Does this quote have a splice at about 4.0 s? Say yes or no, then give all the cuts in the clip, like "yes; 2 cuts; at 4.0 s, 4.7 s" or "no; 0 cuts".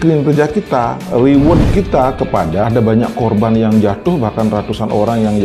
no; 1 cut; at 2.6 s